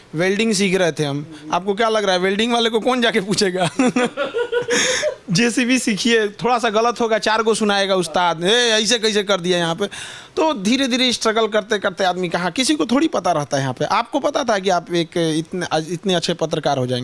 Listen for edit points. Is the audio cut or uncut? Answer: uncut